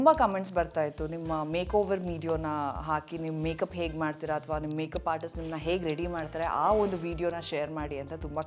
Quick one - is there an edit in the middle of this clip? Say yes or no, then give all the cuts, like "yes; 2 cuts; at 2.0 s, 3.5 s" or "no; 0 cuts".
no; 0 cuts